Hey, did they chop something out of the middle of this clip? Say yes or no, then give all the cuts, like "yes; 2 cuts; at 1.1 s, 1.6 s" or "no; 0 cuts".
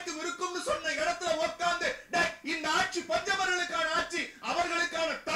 no; 0 cuts